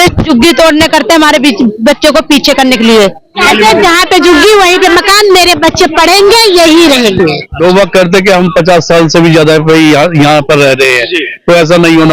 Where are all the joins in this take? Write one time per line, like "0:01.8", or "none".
0:03.4
0:07.6